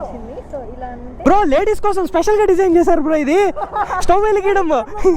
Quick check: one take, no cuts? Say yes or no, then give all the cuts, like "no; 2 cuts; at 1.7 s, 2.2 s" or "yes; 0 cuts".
no; 1 cut; at 1.2 s